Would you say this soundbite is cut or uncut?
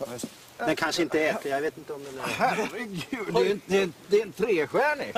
cut